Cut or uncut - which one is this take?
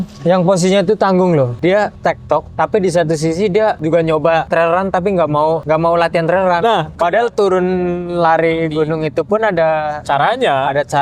cut